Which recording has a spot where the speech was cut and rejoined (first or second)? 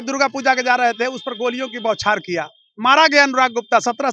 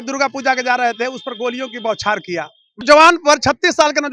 second